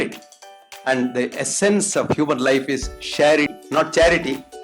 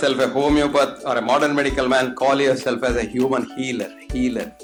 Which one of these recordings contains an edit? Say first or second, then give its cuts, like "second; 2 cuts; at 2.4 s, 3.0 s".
first; 1 cut; at 3.6 s